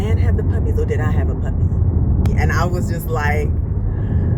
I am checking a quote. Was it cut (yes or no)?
yes